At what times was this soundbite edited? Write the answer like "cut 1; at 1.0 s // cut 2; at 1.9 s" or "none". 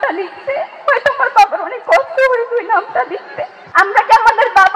cut 1; at 3.6 s